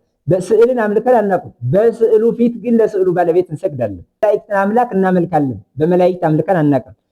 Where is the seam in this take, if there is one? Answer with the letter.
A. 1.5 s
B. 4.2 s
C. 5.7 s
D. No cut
B